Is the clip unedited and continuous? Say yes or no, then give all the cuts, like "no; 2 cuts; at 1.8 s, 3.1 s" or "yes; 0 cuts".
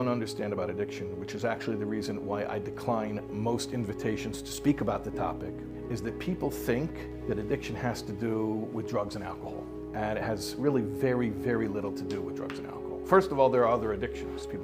yes; 0 cuts